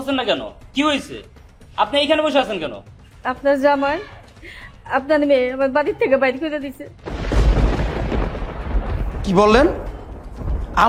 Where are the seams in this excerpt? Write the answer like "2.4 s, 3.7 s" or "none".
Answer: none

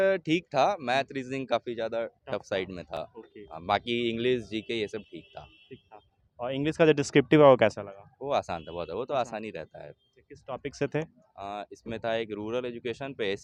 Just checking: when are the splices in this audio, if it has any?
none

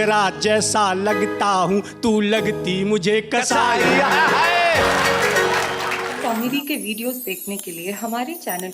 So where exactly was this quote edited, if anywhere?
6.1 s

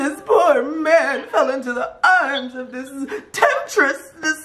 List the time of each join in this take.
none

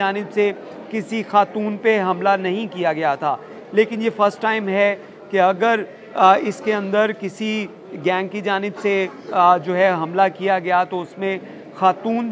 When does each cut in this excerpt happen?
none

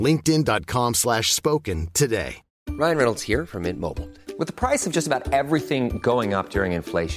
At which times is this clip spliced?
2.6 s

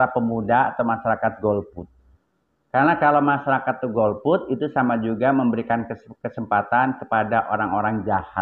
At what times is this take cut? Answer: none

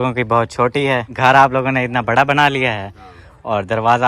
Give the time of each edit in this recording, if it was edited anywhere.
1.1 s

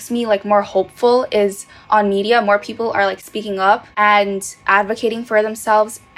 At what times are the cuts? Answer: 3.9 s

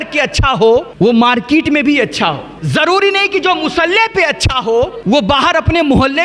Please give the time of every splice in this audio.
0.9 s, 2.5 s, 5.0 s

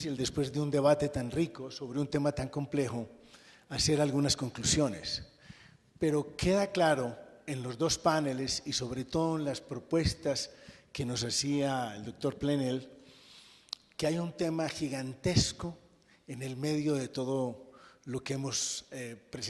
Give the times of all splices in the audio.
13.0 s

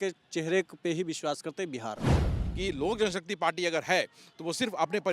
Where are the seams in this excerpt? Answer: 2.4 s

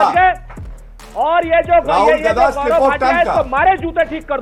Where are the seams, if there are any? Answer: none

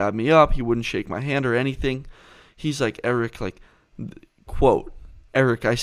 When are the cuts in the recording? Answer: none

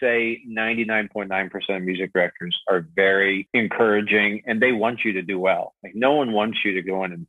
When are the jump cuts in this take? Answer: 3.4 s

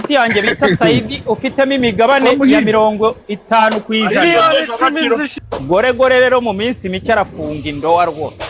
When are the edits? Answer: 5.3 s

